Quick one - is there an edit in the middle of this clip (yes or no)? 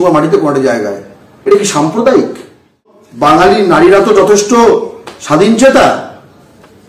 yes